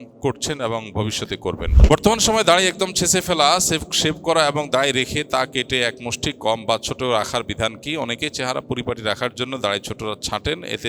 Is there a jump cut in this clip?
yes; 1 cut; at 1.7 s

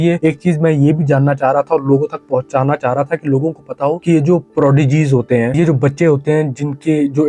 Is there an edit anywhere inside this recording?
no; 0 cuts

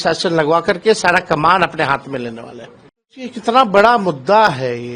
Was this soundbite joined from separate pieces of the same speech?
yes; 1 cut; at 3.3 s

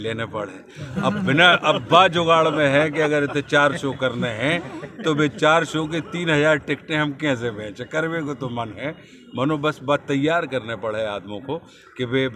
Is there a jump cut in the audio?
no; 0 cuts

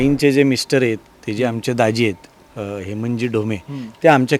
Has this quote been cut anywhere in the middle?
no; 0 cuts

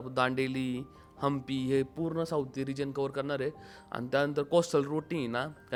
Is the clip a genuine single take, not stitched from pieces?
yes; 0 cuts

